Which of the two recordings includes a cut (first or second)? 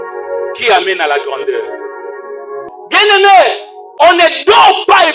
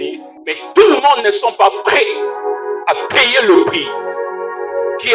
first